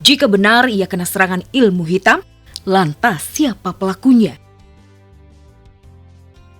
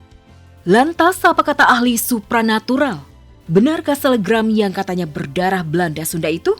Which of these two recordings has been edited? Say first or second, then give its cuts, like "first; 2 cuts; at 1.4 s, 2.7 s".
first; 1 cut; at 4.4 s